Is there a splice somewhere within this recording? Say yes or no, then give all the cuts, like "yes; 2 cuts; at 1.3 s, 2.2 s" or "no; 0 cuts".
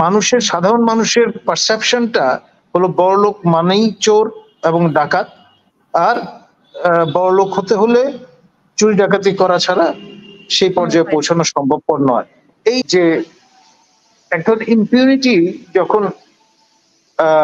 yes; 1 cut; at 12.8 s